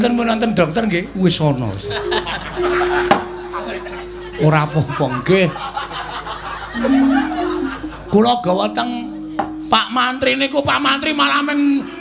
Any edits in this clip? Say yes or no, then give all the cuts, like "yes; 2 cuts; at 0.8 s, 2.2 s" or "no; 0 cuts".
no; 0 cuts